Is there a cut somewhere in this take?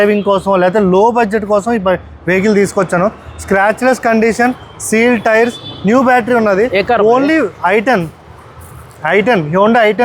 no; 0 cuts

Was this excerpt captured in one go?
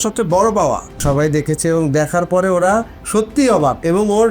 no; 1 cut; at 1.0 s

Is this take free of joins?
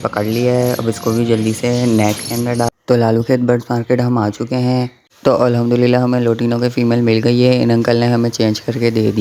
no; 2 cuts; at 2.7 s, 5.0 s

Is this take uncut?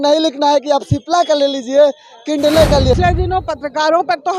no; 1 cut; at 3.0 s

